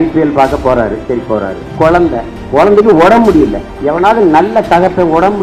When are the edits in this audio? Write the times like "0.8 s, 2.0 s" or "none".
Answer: 1.6 s, 2.4 s, 3.7 s